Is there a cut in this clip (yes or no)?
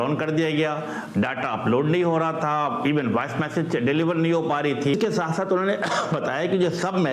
no